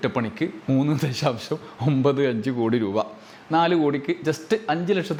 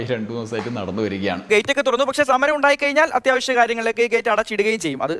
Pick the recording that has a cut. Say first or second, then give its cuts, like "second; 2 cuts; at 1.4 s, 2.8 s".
second; 1 cut; at 1.5 s